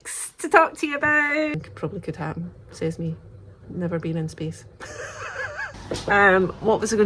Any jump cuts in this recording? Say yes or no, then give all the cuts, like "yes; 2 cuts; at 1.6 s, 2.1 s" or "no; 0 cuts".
yes; 2 cuts; at 1.6 s, 5.7 s